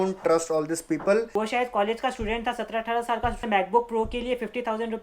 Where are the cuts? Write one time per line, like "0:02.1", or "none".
0:01.3
0:03.4